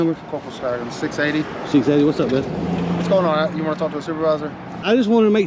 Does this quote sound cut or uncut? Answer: uncut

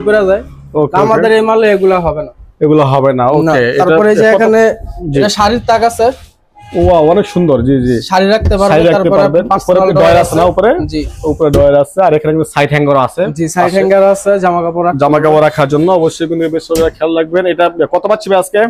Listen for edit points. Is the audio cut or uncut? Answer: uncut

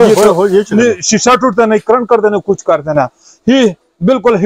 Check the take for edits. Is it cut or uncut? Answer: uncut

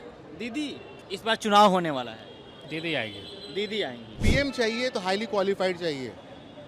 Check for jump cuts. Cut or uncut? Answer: cut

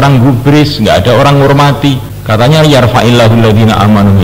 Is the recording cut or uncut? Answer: cut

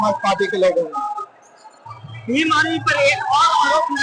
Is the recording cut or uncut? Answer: uncut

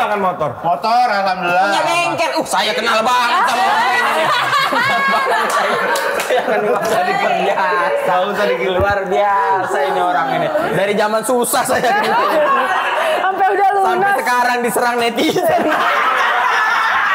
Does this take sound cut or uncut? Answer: uncut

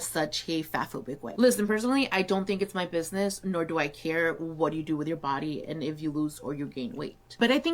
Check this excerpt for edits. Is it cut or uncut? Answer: cut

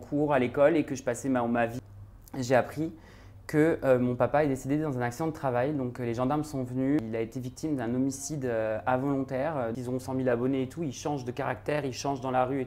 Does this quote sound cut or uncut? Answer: cut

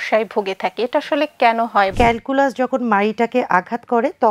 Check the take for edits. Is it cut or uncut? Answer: cut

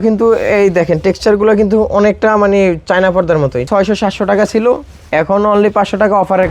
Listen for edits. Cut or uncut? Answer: cut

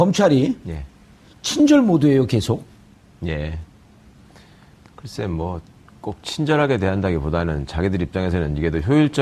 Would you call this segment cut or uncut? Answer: uncut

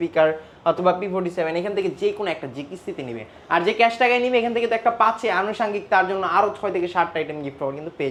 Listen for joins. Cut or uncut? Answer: uncut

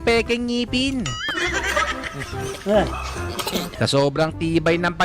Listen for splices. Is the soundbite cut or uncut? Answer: cut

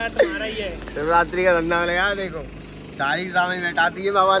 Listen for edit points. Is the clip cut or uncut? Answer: uncut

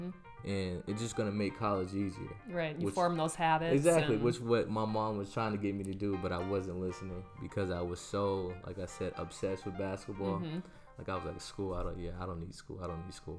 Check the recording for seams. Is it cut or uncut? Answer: uncut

